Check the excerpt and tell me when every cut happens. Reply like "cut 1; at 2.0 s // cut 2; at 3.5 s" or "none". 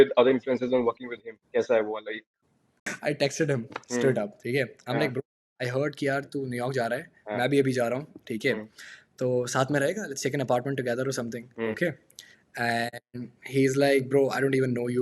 cut 1; at 2.9 s